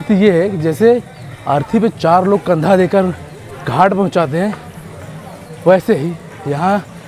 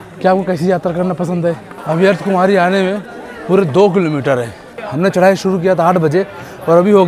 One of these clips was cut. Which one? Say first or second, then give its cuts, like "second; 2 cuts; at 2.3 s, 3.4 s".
second; 2 cuts; at 1.7 s, 4.7 s